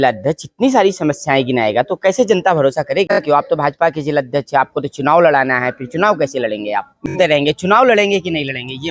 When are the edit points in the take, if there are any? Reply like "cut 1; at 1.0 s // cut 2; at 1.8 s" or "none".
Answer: cut 1; at 3.2 s // cut 2; at 7.1 s

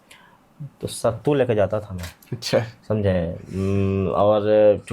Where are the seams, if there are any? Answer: none

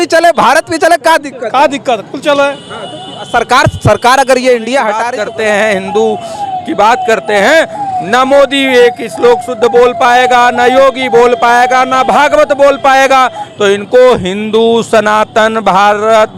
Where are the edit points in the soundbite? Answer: cut 1; at 5.1 s

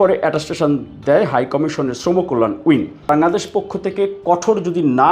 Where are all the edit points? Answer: cut 1; at 3.1 s

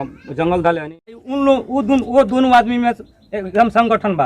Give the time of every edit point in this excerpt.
cut 1; at 1.3 s

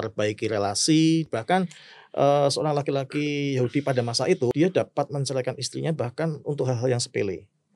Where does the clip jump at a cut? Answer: cut 1; at 1.3 s // cut 2; at 4.5 s

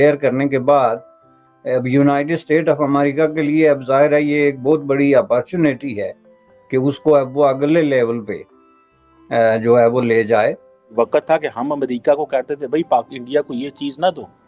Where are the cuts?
cut 1; at 10.9 s

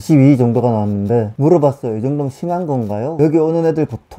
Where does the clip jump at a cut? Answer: cut 1; at 3.1 s

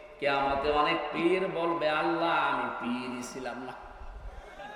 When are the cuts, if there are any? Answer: none

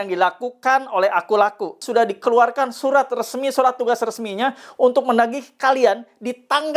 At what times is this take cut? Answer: cut 1; at 1.8 s

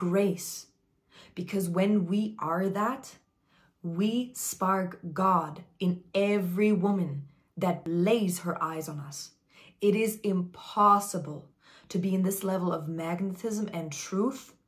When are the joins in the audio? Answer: cut 1; at 7.8 s

